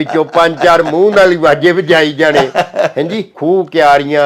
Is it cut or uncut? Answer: cut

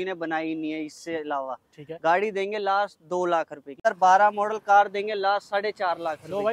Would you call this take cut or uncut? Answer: cut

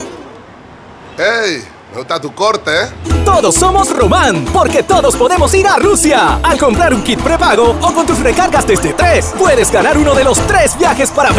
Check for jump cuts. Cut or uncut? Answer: uncut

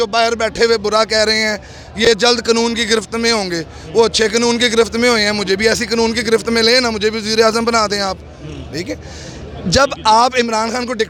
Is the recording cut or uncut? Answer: uncut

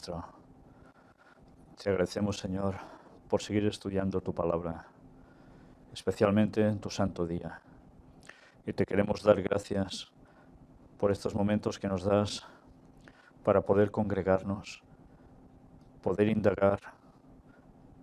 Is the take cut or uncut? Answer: uncut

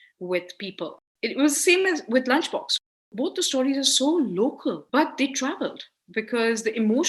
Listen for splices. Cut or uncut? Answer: cut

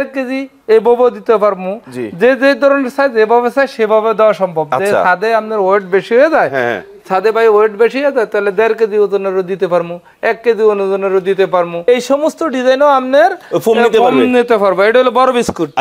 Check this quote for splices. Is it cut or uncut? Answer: cut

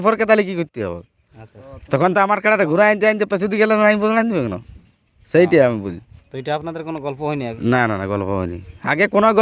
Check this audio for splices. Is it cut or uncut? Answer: uncut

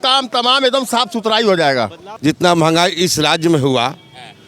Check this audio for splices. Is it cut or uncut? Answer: cut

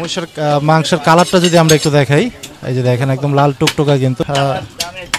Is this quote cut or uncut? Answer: cut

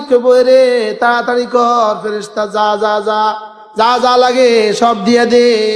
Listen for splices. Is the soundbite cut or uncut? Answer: uncut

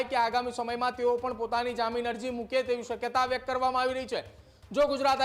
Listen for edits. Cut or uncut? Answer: uncut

